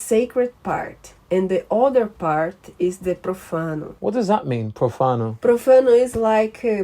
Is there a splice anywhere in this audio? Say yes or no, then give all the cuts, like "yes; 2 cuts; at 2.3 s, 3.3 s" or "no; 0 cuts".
yes; 2 cuts; at 3.9 s, 5.3 s